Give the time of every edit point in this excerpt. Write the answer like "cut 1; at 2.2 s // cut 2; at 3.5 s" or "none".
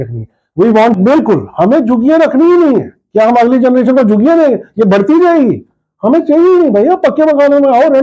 cut 1; at 1.0 s